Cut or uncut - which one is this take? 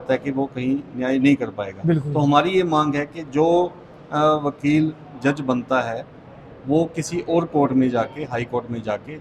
uncut